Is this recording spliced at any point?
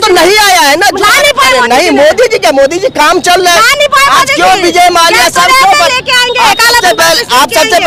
no; 0 cuts

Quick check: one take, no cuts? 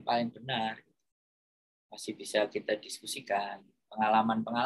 yes; 0 cuts

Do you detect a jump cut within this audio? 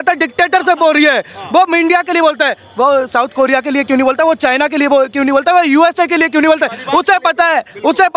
no; 0 cuts

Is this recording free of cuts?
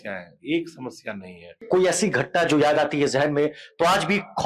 no; 1 cut; at 1.6 s

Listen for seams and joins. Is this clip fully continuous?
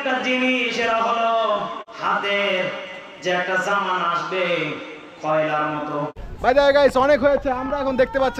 no; 2 cuts; at 1.9 s, 6.3 s

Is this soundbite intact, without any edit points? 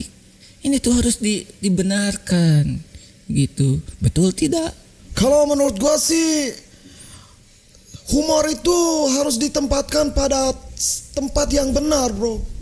no; 1 cut; at 4.9 s

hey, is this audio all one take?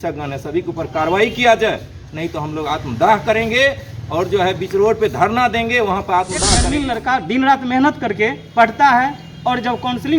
no; 1 cut; at 6.6 s

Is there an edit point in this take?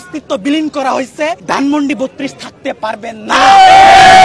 no; 0 cuts

